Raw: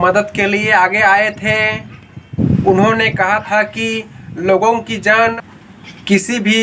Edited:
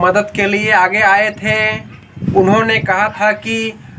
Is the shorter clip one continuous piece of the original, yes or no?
no